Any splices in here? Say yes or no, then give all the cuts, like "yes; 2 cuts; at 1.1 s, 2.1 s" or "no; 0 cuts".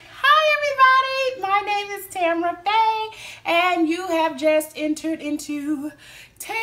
no; 0 cuts